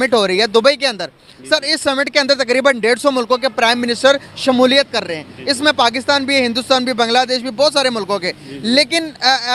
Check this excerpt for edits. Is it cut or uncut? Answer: uncut